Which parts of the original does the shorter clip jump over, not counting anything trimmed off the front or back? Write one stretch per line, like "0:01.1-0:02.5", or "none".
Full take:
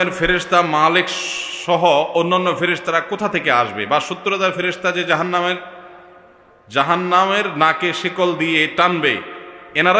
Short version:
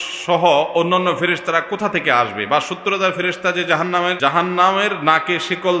0:05.6-0:06.7